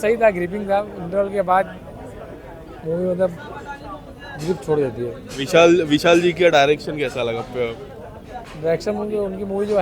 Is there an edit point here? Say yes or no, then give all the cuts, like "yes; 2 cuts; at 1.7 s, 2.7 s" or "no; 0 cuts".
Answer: no; 0 cuts